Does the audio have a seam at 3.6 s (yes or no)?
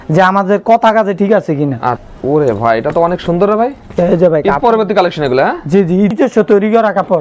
no